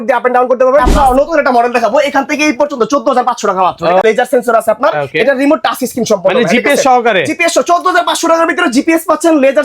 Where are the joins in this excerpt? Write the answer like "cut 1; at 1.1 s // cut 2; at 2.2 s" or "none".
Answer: cut 1; at 0.9 s // cut 2; at 4.0 s